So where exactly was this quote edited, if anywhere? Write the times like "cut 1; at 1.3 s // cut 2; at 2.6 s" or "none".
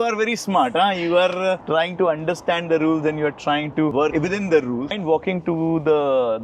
cut 1; at 5.0 s